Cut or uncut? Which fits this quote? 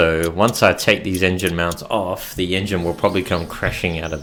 uncut